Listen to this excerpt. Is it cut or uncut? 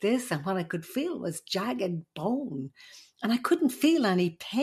uncut